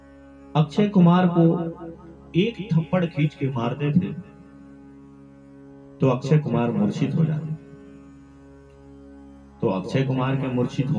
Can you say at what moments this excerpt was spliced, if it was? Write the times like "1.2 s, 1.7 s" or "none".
8.0 s, 9.5 s